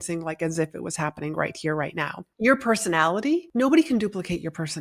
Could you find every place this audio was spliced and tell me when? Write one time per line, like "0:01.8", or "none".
0:02.2
0:03.5